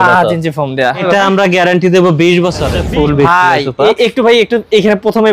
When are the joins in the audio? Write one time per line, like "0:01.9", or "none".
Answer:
0:01.0
0:02.8